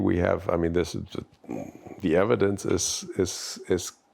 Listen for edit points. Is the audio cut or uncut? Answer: uncut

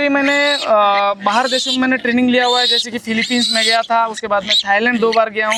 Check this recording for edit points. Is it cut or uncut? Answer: uncut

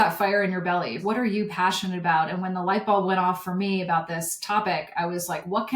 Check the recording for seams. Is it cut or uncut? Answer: cut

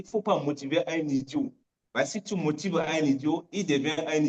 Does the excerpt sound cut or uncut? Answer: uncut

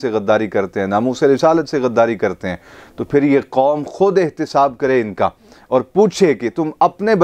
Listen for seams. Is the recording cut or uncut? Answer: uncut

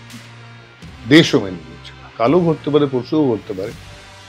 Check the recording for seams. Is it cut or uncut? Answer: cut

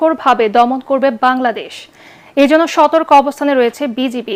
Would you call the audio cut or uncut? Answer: uncut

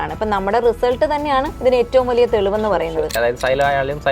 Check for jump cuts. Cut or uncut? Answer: cut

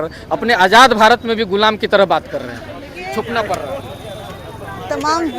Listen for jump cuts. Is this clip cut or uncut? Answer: uncut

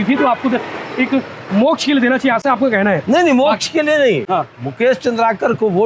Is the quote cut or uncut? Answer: uncut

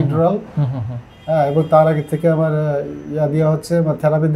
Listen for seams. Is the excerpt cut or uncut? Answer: uncut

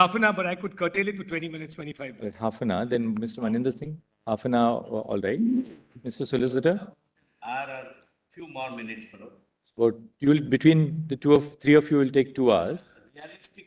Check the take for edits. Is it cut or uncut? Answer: uncut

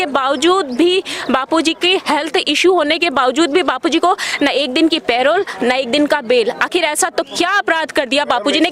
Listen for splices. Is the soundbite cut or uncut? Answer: uncut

